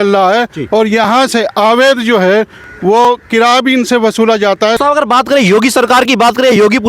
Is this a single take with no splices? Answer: no; 1 cut; at 4.8 s

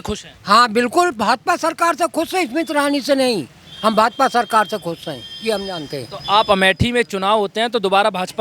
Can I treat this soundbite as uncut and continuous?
yes; 0 cuts

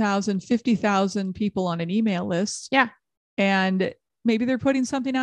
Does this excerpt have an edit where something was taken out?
no; 0 cuts

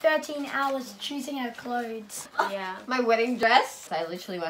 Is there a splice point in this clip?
yes; 2 cuts; at 2.3 s, 3.4 s

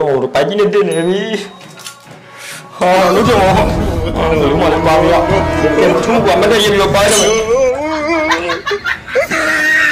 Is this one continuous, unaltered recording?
yes; 0 cuts

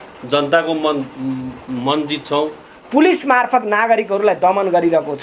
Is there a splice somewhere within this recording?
yes; 1 cut; at 2.7 s

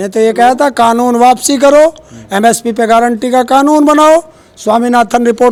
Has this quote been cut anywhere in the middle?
no; 0 cuts

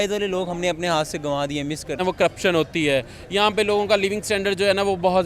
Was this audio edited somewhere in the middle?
yes; 1 cut; at 2.0 s

